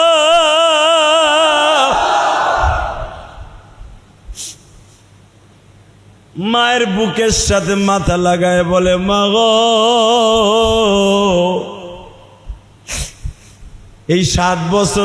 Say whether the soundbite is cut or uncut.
uncut